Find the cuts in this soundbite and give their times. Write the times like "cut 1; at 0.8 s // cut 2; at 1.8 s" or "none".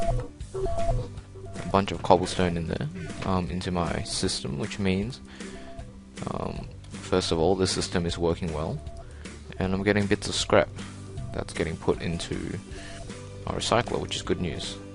cut 1; at 0.9 s